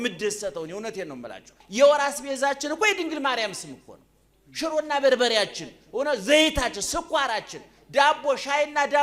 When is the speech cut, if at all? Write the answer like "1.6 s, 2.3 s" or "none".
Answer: 1.6 s

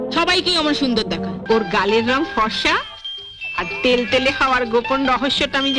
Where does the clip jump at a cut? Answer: 1.4 s

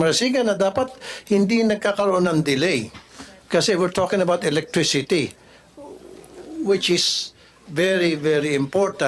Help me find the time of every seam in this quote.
none

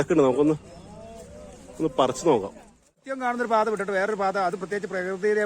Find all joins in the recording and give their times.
3.1 s

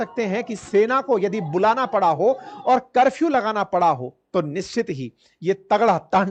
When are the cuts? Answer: none

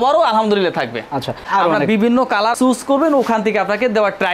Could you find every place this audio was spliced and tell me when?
1.4 s, 2.5 s

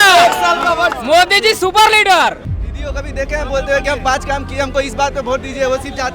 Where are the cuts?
2.4 s

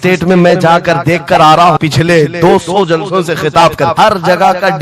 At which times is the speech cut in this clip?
1.8 s, 4.0 s

